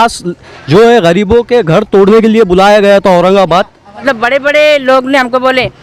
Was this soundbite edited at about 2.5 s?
no; 1 cut; at 3.8 s

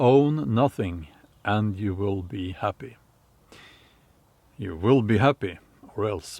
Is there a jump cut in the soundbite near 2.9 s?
no; 0 cuts

